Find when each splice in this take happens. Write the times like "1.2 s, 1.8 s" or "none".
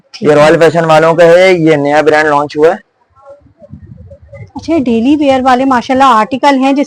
none